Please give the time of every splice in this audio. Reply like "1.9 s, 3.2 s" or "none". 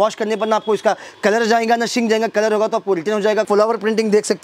3.5 s